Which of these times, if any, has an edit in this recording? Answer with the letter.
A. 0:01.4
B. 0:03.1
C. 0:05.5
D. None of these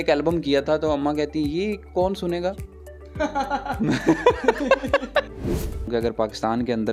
C